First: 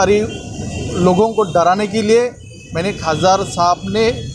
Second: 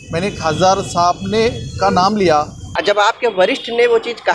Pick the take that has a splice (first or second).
second